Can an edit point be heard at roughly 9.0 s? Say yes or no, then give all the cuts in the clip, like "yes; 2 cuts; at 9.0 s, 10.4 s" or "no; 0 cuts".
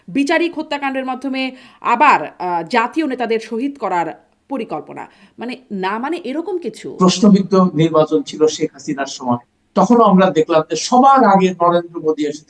no; 1 cut; at 6.8 s